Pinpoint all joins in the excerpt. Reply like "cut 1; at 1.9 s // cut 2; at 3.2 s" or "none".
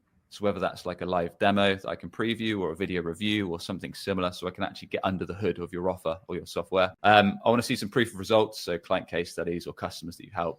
cut 1; at 7.0 s